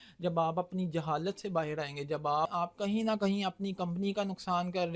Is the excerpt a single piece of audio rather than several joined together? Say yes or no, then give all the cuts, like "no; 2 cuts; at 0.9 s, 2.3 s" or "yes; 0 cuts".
no; 1 cut; at 2.5 s